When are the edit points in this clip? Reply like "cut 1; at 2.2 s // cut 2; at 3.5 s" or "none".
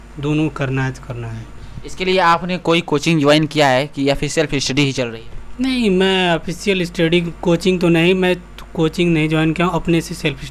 none